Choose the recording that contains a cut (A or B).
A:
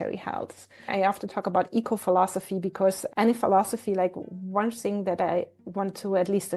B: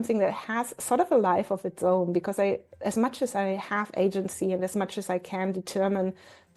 A